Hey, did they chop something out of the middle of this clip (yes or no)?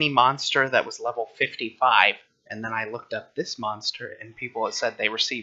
yes